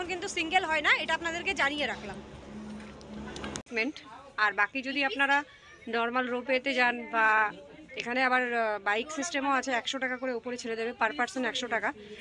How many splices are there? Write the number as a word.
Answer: one